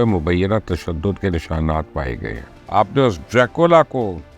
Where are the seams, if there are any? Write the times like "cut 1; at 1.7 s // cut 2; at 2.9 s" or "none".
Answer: cut 1; at 2.5 s